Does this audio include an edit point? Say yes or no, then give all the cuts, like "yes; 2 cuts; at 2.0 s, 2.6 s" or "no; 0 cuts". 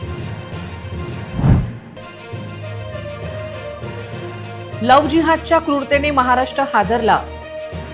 no; 0 cuts